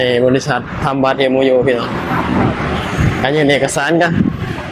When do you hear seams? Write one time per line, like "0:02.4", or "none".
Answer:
none

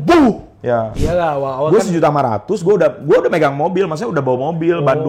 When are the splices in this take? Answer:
0:00.9

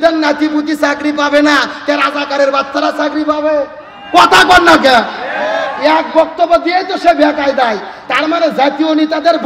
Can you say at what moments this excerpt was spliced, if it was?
none

